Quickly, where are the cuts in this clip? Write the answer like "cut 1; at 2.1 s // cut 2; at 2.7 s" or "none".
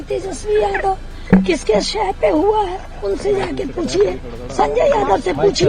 none